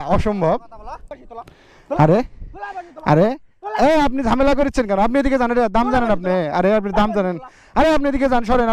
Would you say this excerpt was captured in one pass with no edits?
no; 1 cut; at 1.2 s

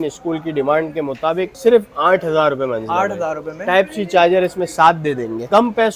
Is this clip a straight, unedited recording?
yes; 0 cuts

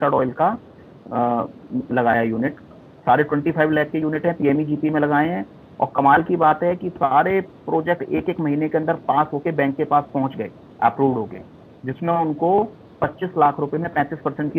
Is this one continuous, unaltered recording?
yes; 0 cuts

